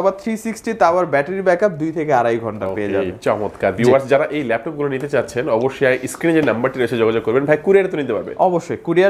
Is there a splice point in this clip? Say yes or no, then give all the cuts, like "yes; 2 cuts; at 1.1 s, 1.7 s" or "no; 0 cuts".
no; 0 cuts